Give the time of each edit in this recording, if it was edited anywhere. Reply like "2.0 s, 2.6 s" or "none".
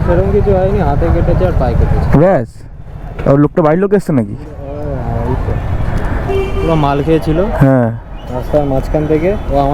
none